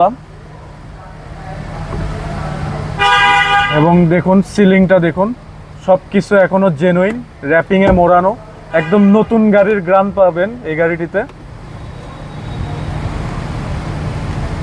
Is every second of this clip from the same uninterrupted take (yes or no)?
yes